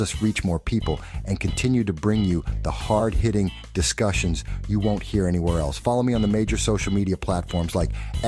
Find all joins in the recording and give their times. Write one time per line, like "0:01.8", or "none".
none